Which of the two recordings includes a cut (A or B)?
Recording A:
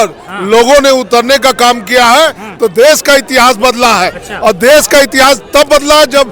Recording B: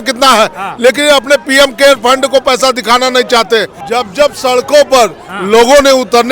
B